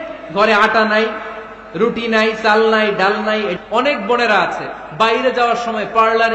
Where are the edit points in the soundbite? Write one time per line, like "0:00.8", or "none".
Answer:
0:03.6